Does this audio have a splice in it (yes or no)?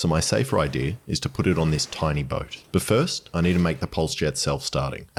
no